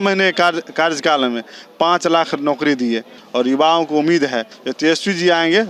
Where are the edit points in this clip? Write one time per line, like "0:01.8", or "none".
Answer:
0:03.1
0:04.6